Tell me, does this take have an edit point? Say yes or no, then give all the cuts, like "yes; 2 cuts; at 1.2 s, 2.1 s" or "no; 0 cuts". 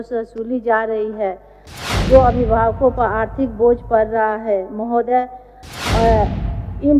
no; 0 cuts